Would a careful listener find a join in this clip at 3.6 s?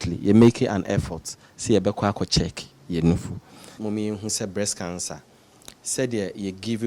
yes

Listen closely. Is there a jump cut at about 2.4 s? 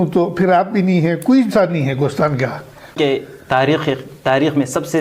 yes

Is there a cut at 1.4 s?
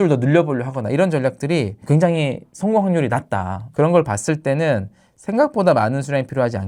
no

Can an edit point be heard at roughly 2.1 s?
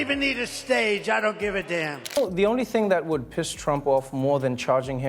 yes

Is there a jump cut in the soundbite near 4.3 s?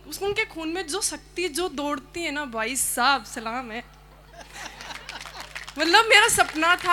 no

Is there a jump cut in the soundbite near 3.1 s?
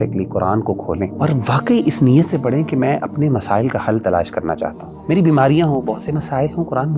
no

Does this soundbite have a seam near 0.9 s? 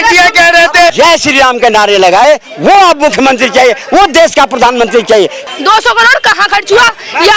yes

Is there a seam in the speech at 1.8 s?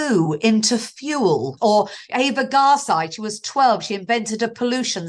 yes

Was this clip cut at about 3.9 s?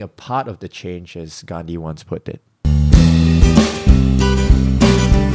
no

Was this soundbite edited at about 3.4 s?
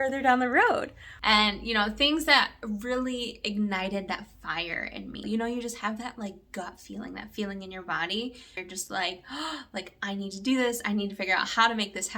no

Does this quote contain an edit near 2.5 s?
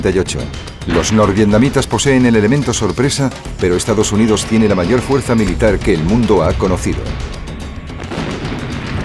no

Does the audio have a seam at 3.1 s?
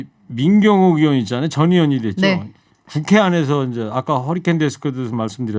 no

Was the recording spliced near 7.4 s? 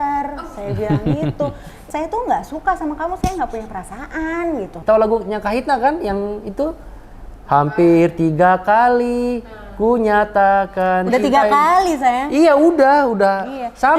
no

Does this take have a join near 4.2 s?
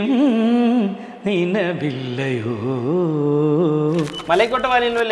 yes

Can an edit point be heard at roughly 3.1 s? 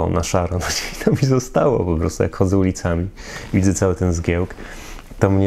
no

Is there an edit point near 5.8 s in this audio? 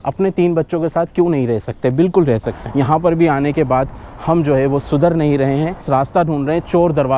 yes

